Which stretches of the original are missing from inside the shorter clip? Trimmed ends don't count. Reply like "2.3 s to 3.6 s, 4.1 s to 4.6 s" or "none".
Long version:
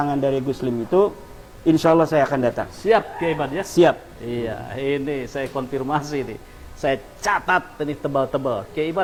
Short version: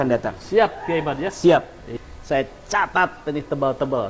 4.2 s to 6.4 s